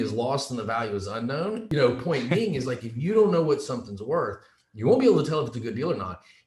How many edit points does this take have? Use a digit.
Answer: 1